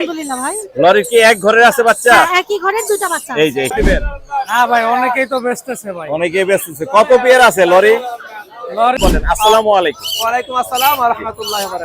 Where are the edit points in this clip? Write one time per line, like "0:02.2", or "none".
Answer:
0:03.7
0:09.0

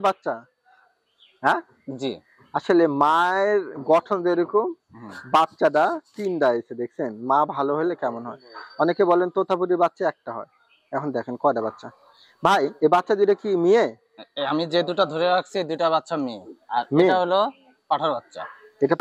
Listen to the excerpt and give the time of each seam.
none

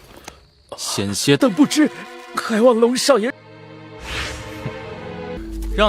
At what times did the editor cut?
none

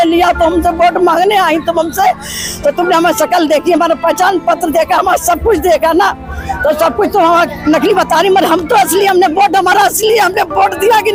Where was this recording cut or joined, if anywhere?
none

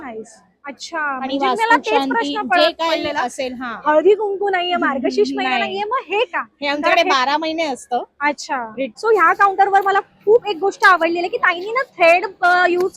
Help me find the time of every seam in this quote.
0:08.9

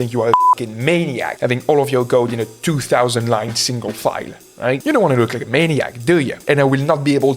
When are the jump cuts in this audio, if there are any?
0:06.4

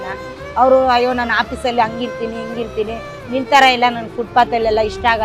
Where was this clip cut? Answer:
none

